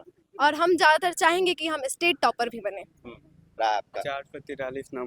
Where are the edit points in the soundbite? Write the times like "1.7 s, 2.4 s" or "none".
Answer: 3.6 s